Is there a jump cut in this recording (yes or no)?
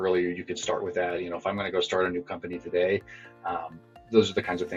no